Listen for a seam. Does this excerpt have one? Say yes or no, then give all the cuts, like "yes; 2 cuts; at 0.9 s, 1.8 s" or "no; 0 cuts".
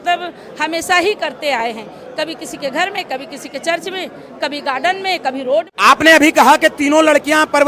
yes; 1 cut; at 5.7 s